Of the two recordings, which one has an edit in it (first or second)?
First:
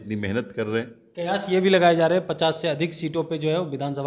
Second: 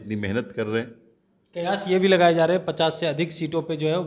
first